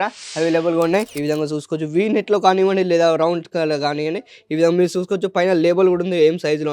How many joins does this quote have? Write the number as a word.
one